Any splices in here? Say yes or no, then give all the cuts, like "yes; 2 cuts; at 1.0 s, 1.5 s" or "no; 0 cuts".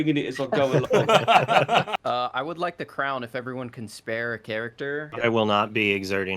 yes; 2 cuts; at 1.9 s, 5.1 s